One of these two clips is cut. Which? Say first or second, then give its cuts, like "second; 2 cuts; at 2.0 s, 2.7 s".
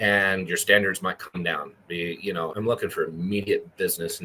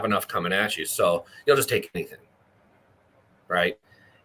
first; 1 cut; at 2.5 s